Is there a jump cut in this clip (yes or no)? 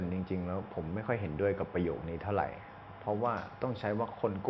no